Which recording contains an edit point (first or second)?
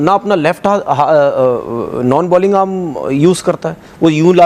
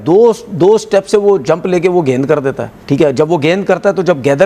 second